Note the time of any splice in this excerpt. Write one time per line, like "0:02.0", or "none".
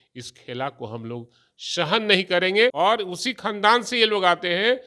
0:02.7